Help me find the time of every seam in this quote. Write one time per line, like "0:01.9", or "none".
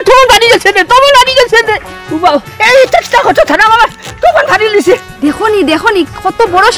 0:05.1